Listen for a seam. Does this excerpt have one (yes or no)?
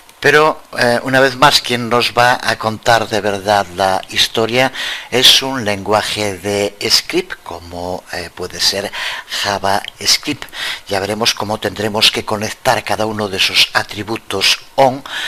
no